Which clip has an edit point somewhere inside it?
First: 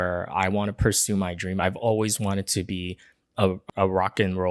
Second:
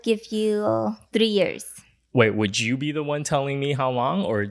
first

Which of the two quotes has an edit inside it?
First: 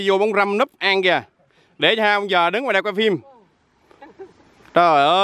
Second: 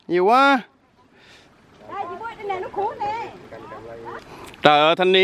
second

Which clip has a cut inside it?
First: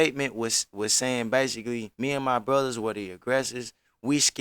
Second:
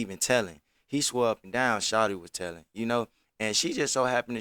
first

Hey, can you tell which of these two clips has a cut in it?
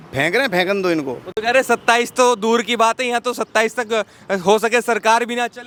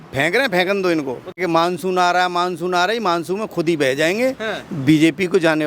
second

